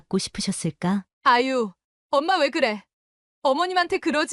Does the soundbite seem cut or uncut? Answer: cut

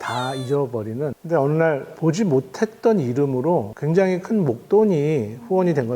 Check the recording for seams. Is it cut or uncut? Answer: cut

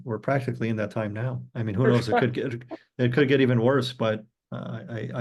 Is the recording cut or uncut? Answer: uncut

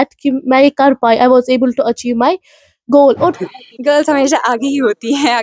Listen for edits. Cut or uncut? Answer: cut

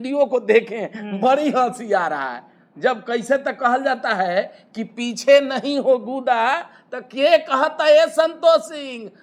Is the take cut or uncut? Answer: uncut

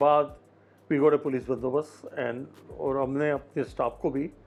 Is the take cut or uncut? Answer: uncut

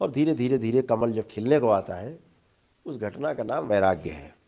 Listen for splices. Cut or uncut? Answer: uncut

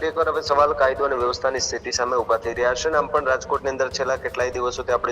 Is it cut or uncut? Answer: uncut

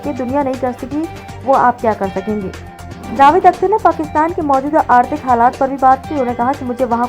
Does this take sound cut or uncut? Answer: cut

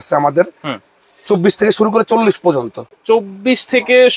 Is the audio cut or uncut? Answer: uncut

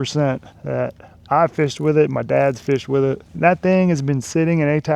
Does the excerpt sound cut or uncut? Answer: uncut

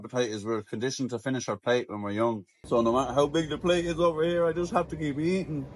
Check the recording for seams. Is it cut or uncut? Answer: cut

